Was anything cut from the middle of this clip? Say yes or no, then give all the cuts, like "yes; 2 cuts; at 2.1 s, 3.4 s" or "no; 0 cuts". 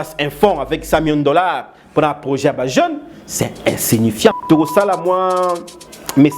yes; 1 cut; at 4.4 s